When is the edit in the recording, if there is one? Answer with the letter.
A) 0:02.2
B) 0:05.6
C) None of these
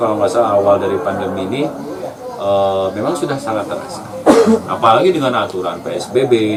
C